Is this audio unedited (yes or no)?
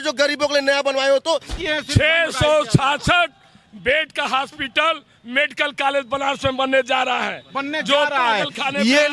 no